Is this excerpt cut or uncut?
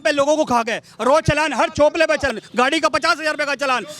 cut